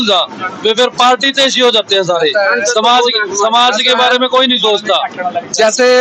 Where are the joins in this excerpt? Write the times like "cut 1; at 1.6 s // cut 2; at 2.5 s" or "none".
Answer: none